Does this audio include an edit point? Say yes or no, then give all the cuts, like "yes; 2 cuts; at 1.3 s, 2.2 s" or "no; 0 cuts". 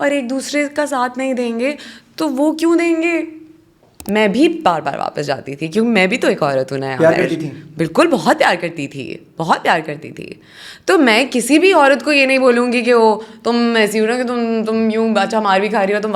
yes; 1 cut; at 4.0 s